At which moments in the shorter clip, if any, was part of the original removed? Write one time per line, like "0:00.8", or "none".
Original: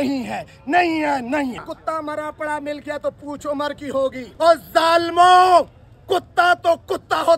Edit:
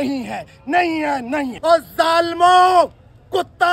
0:01.5